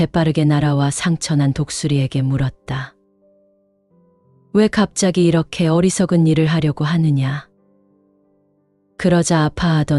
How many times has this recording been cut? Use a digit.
2